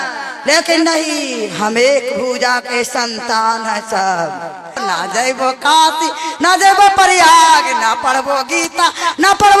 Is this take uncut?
no; 1 cut; at 4.8 s

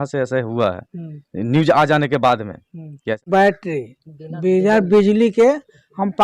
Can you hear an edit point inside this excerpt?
yes; 1 cut; at 3.2 s

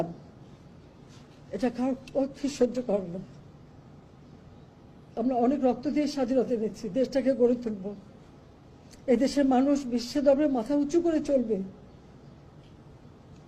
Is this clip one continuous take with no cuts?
yes; 0 cuts

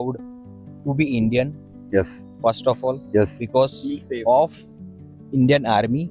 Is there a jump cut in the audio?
no; 0 cuts

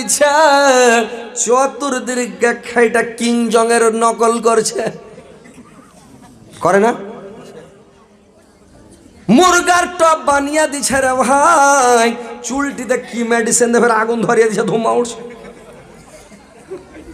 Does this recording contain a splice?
no; 0 cuts

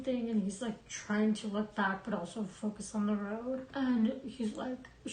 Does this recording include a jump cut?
yes; 1 cut; at 3.7 s

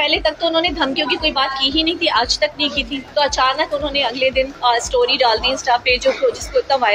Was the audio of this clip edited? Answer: yes; 2 cuts; at 3.0 s, 4.5 s

